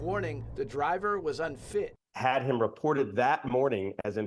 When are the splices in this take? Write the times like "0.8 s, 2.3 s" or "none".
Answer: 2.0 s